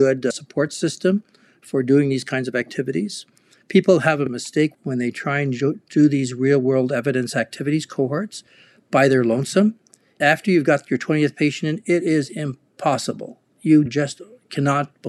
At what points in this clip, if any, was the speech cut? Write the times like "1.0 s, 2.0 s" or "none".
10.2 s